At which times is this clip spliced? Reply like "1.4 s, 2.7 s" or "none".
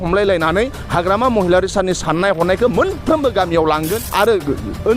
4.0 s